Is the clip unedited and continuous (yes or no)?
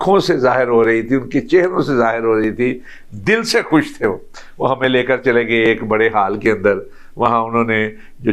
yes